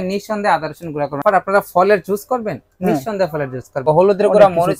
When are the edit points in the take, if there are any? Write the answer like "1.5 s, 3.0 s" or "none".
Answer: 1.2 s, 3.8 s